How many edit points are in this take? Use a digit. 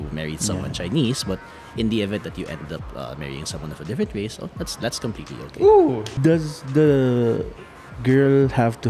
1